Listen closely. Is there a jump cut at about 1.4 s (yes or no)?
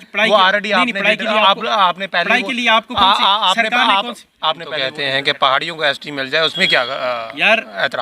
no